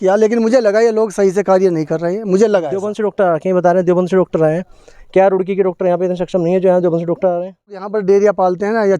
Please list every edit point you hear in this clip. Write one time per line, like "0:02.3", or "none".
0:02.9
0:07.9